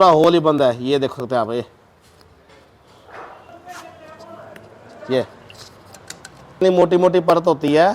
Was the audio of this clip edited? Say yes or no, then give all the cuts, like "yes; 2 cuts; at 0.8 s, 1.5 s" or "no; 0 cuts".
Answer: yes; 2 cuts; at 3.5 s, 6.6 s